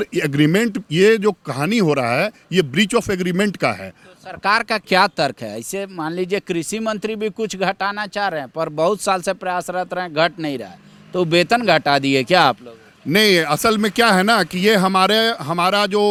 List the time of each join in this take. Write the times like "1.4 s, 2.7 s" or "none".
none